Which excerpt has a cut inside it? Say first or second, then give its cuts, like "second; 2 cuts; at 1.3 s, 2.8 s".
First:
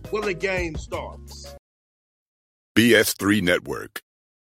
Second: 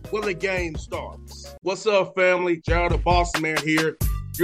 first; 1 cut; at 1.5 s